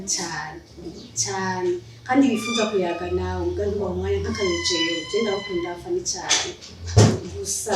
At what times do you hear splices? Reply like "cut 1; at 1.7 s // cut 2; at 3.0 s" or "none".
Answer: none